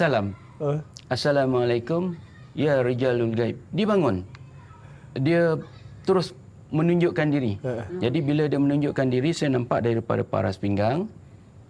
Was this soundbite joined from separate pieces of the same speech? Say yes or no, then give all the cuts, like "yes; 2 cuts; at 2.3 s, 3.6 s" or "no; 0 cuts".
no; 0 cuts